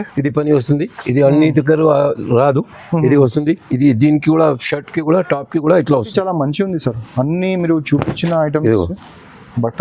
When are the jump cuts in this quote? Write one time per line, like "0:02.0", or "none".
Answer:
0:06.1